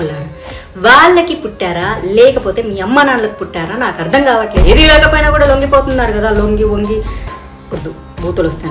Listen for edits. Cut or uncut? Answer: cut